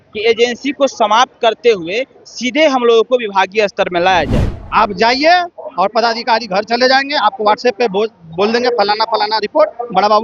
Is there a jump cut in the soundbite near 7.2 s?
no; 1 cut; at 4.5 s

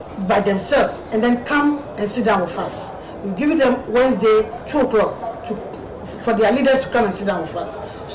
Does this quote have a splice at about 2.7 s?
no; 2 cuts; at 1.0 s, 4.6 s

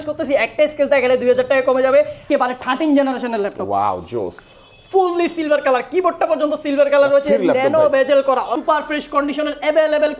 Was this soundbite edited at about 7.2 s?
no; 2 cuts; at 2.2 s, 8.5 s

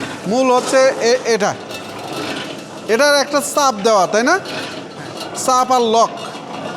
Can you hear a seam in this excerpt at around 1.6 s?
no; 0 cuts

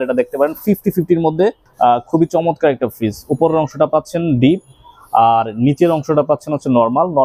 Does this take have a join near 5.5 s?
no; 1 cut; at 1.6 s

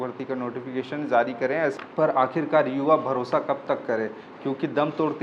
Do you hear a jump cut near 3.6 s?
no; 1 cut; at 1.8 s

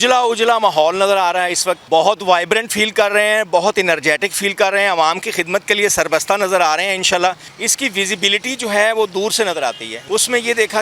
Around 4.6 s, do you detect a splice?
no; 3 cuts; at 1.8 s, 7.5 s, 9.9 s

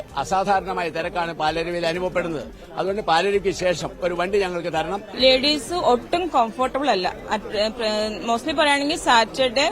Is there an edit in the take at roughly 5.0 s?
yes; 1 cut; at 5.0 s

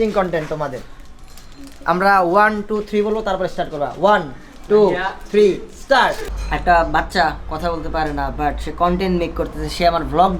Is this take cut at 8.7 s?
no; 1 cut; at 6.3 s

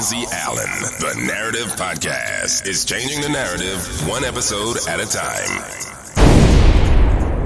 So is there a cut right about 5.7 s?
no; 0 cuts

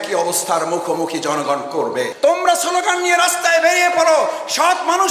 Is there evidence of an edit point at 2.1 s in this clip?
yes; 1 cut; at 2.1 s

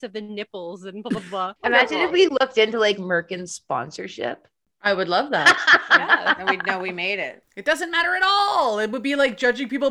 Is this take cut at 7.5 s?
yes; 2 cuts; at 1.5 s, 7.5 s

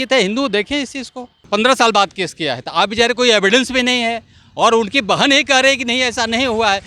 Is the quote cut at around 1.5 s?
yes; 1 cut; at 1.5 s

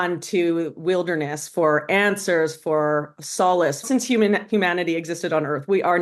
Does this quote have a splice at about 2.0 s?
no; 1 cut; at 3.9 s

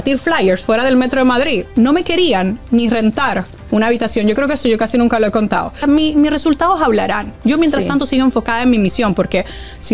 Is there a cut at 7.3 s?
no; 2 cuts; at 1.7 s, 5.8 s

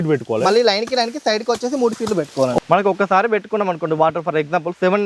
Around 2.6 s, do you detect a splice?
yes; 1 cut; at 2.6 s

